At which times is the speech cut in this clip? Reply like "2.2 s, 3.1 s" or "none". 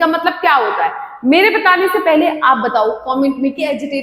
none